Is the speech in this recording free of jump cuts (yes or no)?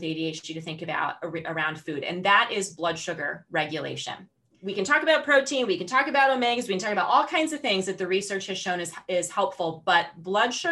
yes